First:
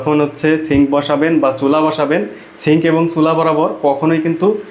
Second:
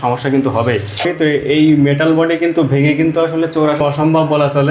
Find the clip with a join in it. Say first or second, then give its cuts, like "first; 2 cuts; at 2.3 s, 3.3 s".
second; 2 cuts; at 1.1 s, 3.8 s